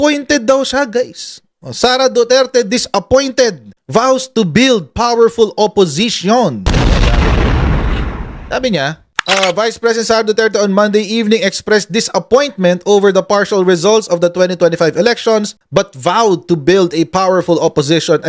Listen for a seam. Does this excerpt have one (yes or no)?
no